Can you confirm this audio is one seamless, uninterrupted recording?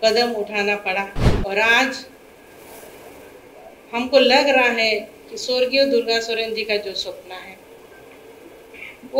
no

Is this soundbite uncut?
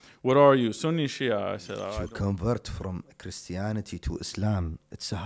no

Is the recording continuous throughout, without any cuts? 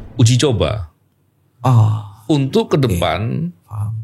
yes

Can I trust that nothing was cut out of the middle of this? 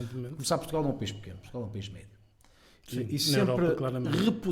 yes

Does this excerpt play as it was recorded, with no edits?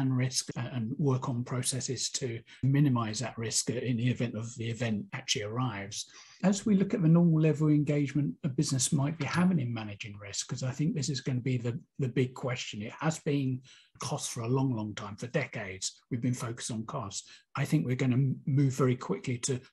no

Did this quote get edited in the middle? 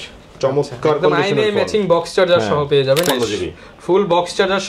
yes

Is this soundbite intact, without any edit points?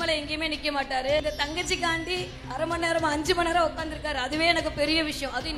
no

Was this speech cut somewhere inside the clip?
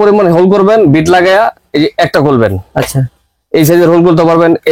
no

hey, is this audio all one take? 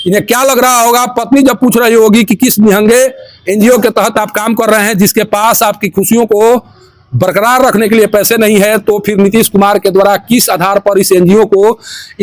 yes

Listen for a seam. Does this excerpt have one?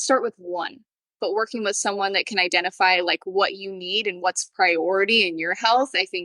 yes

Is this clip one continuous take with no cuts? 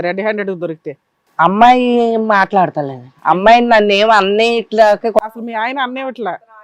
yes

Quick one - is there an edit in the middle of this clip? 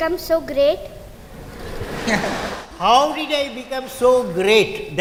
no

